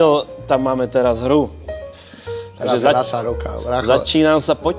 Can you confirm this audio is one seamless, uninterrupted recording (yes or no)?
yes